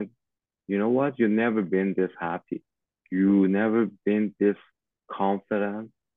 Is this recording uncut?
yes; 0 cuts

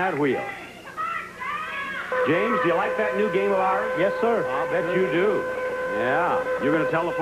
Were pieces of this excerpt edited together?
yes; 1 cut; at 1.4 s

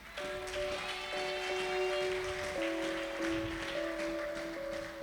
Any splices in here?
no; 0 cuts

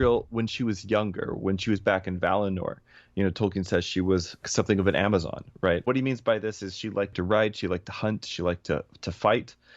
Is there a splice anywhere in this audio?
yes; 3 cuts; at 4.4 s, 5.8 s, 7.1 s

